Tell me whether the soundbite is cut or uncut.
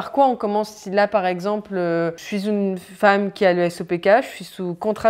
uncut